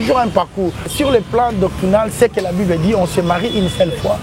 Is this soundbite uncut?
no; 1 cut; at 0.9 s

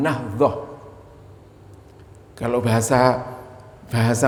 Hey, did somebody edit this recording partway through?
no; 0 cuts

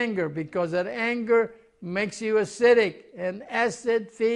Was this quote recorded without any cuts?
yes; 0 cuts

